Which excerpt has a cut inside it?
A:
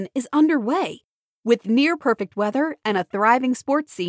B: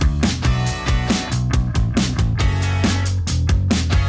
B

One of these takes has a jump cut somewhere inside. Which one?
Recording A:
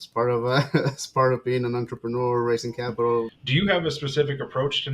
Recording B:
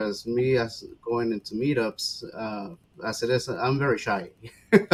A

